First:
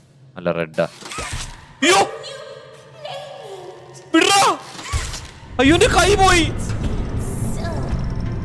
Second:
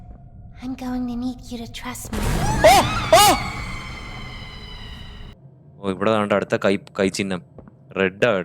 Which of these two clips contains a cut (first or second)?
second